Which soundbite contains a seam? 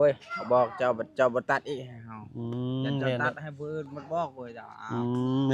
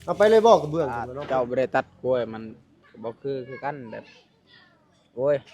second; 1 cut; at 1.1 s

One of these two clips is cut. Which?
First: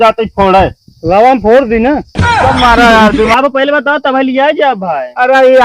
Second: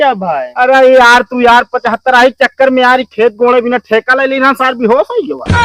first; 1 cut; at 3.3 s

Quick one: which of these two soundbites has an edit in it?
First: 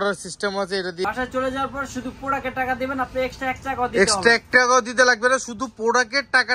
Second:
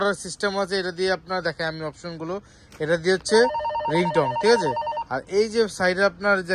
first; 1 cut; at 1.1 s

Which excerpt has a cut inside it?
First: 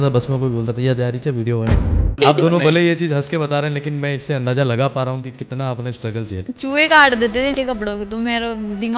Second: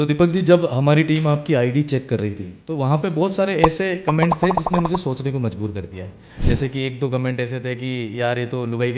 first; 3 cuts; at 1.8 s, 6.4 s, 7.5 s

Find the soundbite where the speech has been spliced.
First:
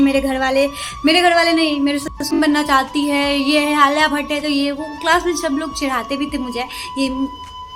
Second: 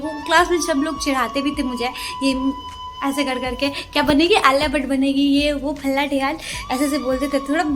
first; 1 cut; at 2.3 s

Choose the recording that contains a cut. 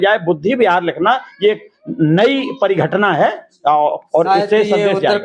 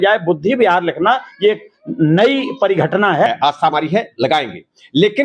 second; 1 cut; at 3.3 s

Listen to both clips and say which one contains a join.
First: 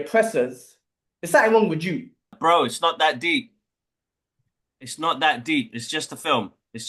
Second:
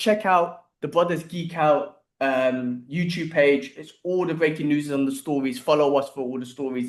first; 1 cut; at 2.2 s

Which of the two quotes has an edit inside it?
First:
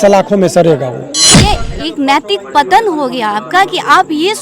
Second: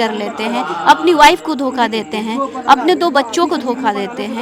first; 1 cut; at 1.4 s

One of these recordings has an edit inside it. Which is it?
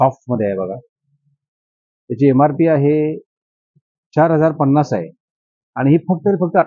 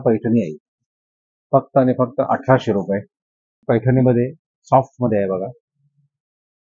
second; 1 cut; at 3.6 s

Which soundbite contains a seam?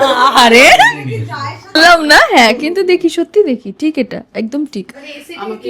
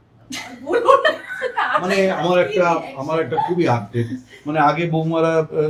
first; 1 cut; at 1.7 s

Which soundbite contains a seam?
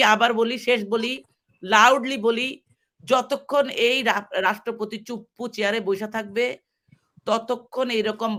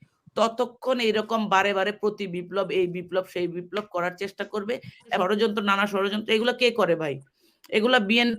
second; 1 cut; at 5.2 s

